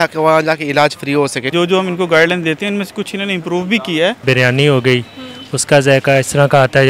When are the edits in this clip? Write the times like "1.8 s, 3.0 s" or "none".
1.5 s, 4.2 s